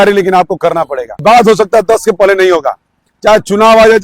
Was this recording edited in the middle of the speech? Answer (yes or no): yes